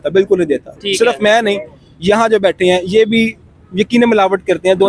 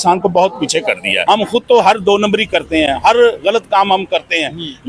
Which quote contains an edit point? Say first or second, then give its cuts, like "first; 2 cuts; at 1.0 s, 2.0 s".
second; 1 cut; at 1.1 s